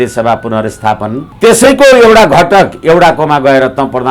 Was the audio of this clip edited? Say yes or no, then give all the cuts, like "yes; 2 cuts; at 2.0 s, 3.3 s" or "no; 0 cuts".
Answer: yes; 1 cut; at 1.2 s